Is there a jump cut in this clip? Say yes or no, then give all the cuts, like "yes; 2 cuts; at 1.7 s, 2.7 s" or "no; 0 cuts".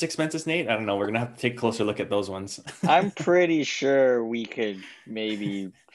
no; 0 cuts